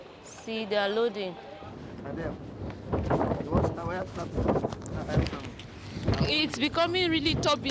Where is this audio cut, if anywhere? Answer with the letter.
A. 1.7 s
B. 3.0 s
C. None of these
A